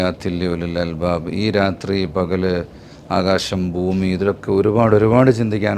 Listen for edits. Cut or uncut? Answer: uncut